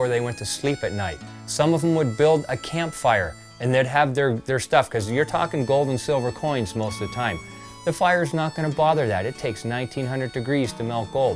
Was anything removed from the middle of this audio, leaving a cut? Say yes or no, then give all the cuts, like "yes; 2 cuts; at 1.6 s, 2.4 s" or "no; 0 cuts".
no; 0 cuts